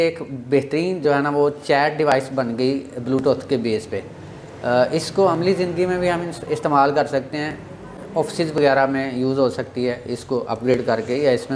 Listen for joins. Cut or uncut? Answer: uncut